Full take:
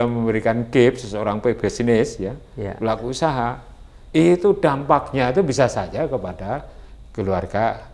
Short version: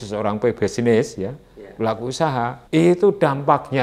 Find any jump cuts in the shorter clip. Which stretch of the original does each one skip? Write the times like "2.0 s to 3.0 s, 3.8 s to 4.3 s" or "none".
3.6 s to 4.0 s